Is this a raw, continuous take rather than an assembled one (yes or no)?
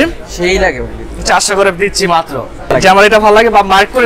no